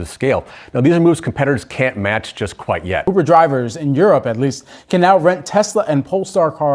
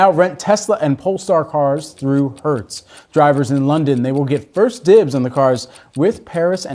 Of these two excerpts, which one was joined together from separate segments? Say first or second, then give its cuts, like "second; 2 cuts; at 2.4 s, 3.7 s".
first; 1 cut; at 3.0 s